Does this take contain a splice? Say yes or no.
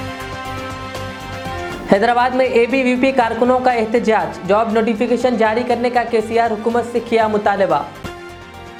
no